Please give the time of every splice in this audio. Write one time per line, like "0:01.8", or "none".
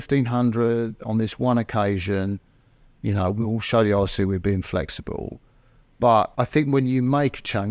0:06.3